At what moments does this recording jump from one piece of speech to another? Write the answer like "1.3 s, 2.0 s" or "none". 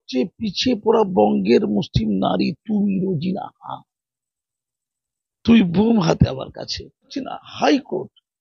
7.1 s